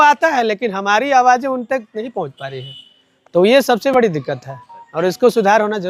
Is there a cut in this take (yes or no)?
no